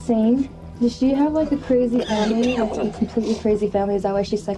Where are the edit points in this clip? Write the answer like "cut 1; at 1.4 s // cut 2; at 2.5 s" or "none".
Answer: none